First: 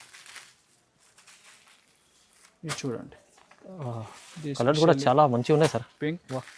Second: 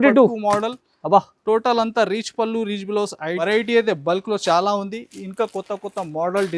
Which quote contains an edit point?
second; 1 cut; at 3.4 s

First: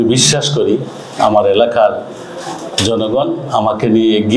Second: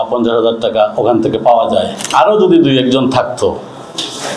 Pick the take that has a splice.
second; 1 cut; at 2.1 s

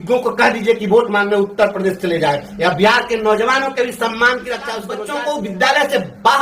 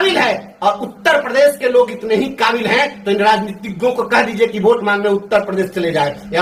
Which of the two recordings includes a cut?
first; 1 cut; at 4.9 s

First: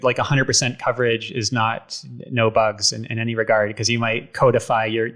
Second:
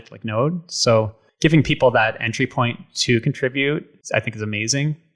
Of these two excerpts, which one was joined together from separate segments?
second; 2 cuts; at 1.2 s, 3.9 s

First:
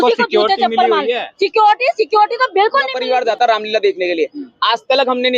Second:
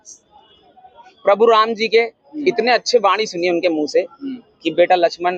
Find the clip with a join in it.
first; 1 cut; at 3.0 s

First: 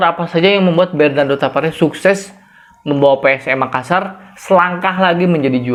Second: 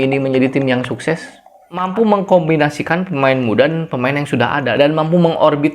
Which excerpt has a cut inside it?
second; 1 cut; at 1.9 s

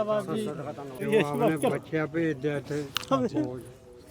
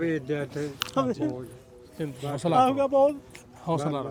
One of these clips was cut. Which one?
first; 1 cut; at 1.0 s

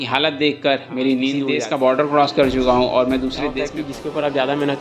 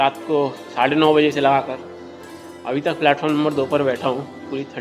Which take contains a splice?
first; 2 cuts; at 1.4 s, 3.5 s

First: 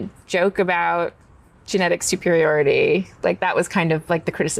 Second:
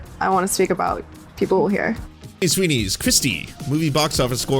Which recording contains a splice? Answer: second; 1 cut; at 2.4 s

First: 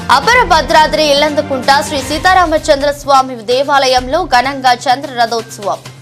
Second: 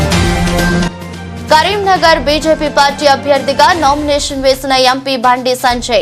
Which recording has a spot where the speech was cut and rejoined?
second; 1 cut; at 1.3 s

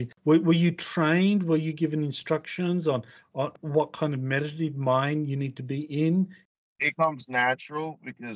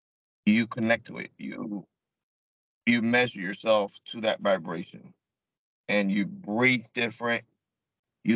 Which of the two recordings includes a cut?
first; 1 cut; at 6.4 s

